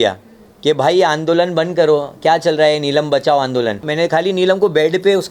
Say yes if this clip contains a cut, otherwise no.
yes